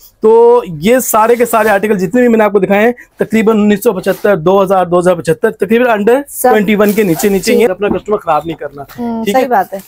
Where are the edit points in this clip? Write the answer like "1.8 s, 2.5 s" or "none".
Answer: 7.7 s